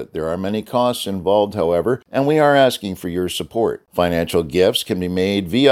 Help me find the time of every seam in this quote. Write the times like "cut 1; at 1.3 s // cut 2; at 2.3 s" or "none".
cut 1; at 2.0 s // cut 2; at 3.8 s